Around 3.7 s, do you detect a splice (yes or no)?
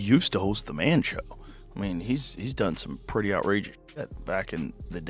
no